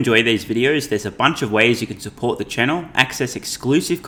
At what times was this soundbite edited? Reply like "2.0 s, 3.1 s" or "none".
none